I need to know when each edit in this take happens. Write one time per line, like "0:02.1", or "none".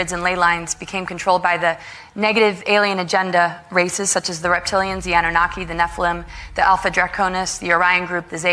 none